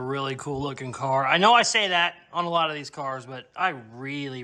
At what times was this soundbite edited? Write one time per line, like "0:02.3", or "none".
none